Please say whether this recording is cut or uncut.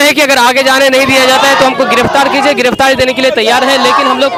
uncut